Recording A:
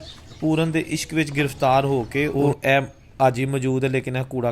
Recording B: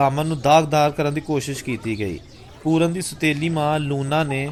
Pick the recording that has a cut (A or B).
A